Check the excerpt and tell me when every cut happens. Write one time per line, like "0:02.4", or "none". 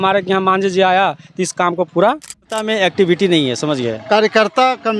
0:02.5